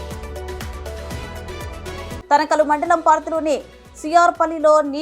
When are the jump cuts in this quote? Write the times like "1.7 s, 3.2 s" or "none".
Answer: 1.5 s